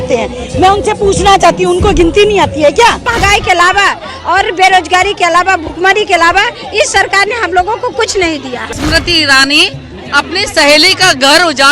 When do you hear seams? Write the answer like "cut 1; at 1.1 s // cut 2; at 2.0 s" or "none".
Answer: cut 1; at 3.1 s // cut 2; at 8.8 s